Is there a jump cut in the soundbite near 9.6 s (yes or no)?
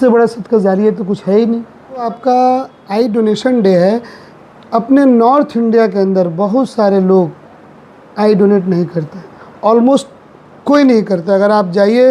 no